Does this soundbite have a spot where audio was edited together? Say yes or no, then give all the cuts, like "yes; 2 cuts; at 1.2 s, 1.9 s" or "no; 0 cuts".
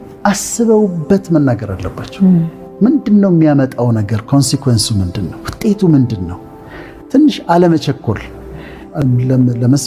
yes; 1 cut; at 8.9 s